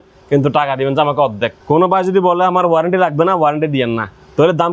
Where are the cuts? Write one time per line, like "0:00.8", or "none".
0:01.6